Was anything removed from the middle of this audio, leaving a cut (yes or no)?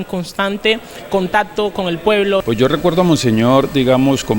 yes